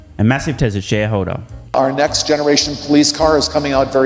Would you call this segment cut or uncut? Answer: cut